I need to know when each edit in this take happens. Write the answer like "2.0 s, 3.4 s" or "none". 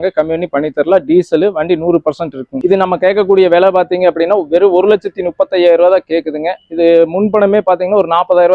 2.6 s